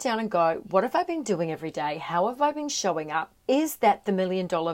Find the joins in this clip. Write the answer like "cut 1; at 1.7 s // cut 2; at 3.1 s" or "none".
cut 1; at 3.3 s